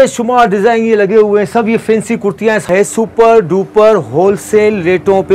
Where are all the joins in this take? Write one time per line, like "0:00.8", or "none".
0:02.7